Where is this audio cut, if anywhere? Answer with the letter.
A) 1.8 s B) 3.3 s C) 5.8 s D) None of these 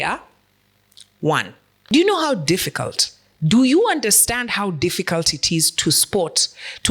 A